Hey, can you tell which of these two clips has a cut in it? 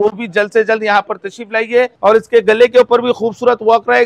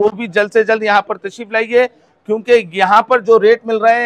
first; 1 cut; at 1.9 s

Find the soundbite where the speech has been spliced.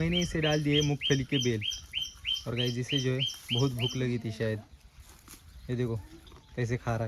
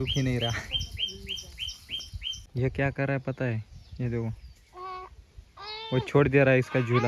second; 1 cut; at 2.4 s

